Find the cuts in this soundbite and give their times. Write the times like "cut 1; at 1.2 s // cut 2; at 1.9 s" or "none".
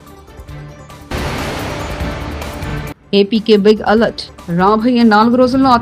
cut 1; at 1.1 s // cut 2; at 2.6 s